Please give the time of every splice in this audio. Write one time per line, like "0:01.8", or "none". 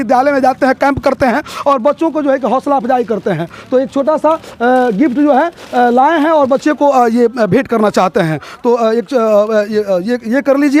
none